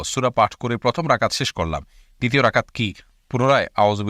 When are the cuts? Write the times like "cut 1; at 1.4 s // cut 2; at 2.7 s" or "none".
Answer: none